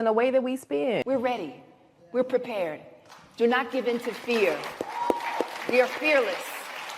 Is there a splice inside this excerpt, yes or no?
yes